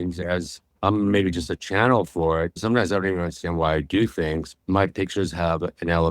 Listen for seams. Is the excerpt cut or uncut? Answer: cut